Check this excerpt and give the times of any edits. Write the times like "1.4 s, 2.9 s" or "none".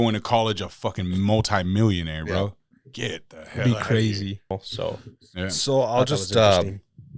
4.6 s